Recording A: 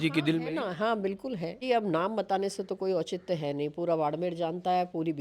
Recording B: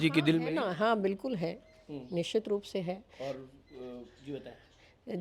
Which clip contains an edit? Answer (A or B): A